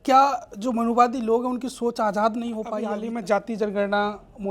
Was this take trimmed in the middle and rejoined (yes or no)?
yes